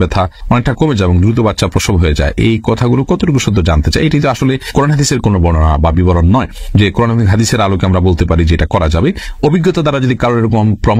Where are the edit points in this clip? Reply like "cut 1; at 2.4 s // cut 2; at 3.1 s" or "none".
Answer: none